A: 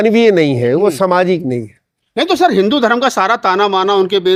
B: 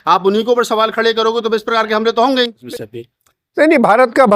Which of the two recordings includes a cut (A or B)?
B